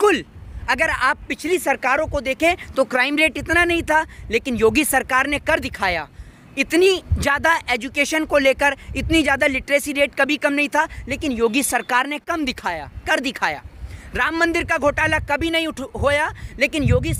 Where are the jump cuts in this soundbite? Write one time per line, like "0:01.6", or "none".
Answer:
none